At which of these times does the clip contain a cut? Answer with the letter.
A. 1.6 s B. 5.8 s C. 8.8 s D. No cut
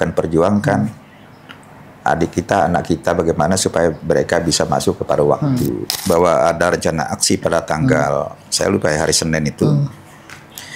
B